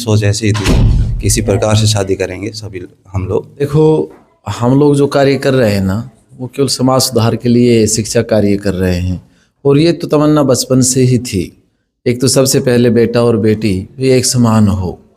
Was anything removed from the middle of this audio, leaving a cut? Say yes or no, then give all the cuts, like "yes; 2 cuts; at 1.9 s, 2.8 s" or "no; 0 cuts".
yes; 1 cut; at 3.6 s